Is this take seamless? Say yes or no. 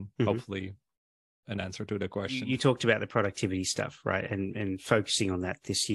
no